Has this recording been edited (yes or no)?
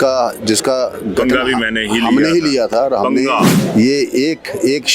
yes